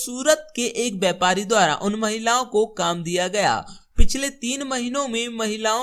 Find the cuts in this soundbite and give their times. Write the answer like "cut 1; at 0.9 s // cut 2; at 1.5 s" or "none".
none